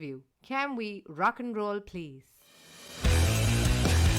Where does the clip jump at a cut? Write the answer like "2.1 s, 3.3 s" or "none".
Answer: none